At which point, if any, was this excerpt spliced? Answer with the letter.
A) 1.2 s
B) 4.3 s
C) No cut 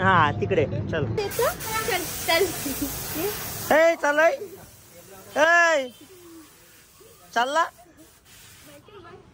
A